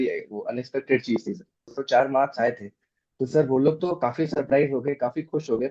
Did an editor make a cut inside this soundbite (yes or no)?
yes